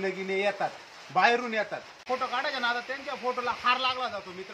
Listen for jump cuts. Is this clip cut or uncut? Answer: cut